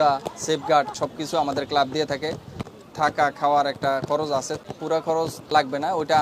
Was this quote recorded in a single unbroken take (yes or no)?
no